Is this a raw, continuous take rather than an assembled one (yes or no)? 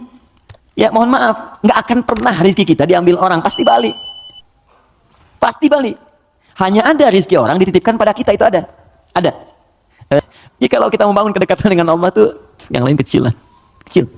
no